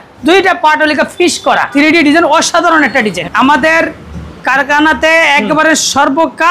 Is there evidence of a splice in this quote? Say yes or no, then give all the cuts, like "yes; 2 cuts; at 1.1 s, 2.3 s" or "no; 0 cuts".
yes; 2 cuts; at 1.7 s, 3.2 s